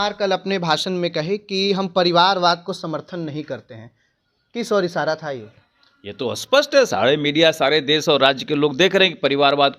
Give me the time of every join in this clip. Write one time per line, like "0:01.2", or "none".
none